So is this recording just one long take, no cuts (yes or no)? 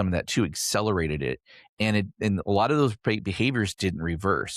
yes